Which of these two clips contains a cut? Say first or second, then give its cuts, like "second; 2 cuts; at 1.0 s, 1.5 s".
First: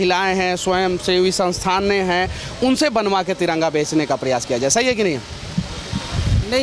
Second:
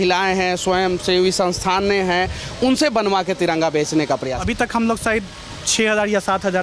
second; 1 cut; at 4.3 s